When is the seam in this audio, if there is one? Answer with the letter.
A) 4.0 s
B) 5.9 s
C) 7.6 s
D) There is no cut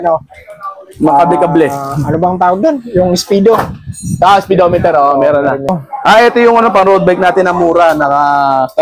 B